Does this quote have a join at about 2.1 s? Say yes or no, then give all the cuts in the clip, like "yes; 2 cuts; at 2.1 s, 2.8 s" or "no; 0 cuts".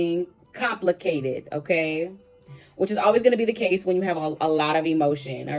no; 0 cuts